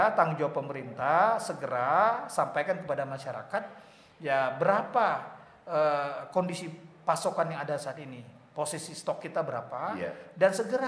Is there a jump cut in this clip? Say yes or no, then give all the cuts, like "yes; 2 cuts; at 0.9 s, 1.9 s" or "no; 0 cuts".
no; 0 cuts